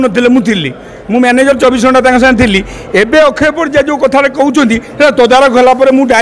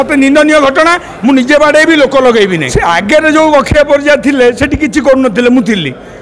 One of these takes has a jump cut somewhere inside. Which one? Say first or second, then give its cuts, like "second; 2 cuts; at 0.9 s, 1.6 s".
second; 1 cut; at 2.7 s